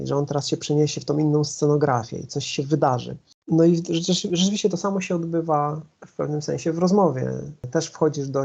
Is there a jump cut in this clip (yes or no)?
yes